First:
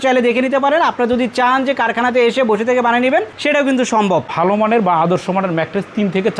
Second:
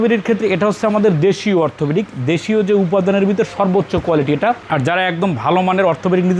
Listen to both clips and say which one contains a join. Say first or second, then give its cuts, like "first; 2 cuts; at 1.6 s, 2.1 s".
first; 1 cut; at 4.3 s